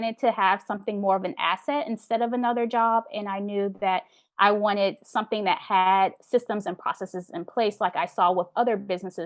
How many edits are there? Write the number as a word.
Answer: zero